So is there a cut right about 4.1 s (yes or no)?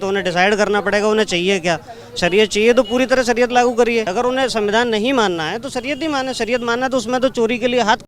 yes